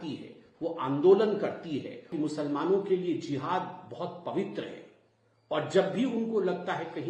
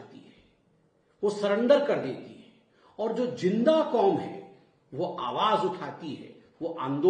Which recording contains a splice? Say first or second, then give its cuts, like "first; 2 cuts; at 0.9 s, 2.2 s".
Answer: first; 1 cut; at 2.1 s